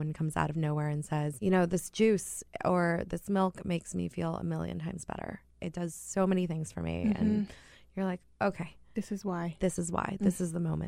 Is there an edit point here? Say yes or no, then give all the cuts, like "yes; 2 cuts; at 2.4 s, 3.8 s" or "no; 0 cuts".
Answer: yes; 2 cuts; at 1.3 s, 5.6 s